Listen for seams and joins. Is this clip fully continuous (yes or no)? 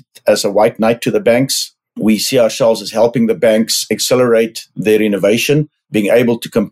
no